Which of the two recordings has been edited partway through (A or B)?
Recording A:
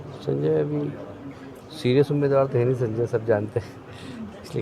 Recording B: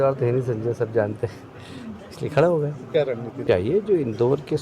B